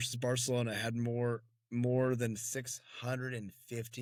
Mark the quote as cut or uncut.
uncut